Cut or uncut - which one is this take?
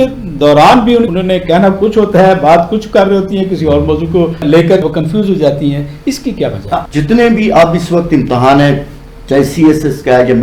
cut